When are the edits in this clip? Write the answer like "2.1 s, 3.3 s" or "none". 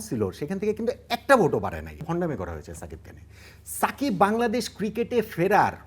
2.0 s